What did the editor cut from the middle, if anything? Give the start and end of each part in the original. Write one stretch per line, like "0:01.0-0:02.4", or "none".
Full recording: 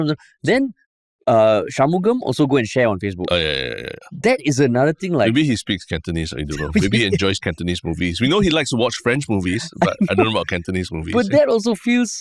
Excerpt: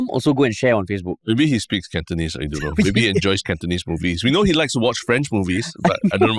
0:03.4-0:05.3